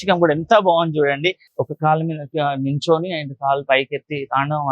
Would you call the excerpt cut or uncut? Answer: cut